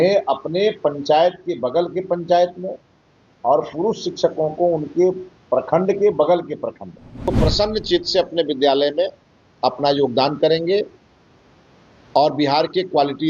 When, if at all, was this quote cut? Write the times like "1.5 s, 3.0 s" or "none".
7.3 s